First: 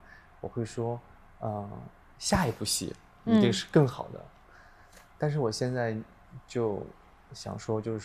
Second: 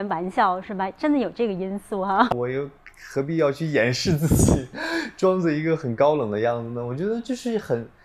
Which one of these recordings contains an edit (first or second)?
second